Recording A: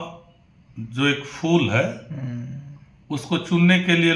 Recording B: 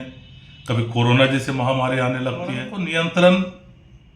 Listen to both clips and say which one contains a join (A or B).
B